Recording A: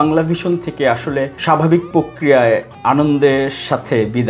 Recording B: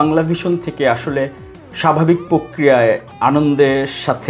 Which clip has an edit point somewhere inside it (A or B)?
A